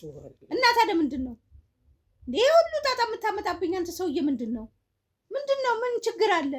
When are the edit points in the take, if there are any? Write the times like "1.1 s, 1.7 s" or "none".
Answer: none